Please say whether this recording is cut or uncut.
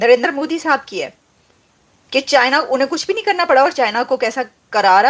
uncut